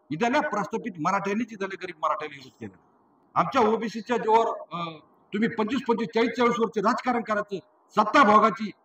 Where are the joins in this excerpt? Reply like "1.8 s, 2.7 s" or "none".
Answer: 3.1 s